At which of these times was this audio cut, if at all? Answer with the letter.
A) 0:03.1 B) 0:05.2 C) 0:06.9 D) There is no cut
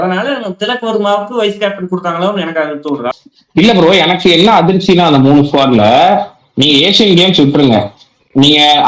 A